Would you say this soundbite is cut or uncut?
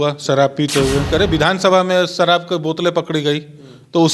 cut